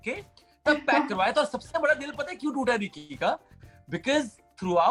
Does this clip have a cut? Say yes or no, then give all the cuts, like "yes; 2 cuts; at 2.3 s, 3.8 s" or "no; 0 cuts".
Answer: no; 0 cuts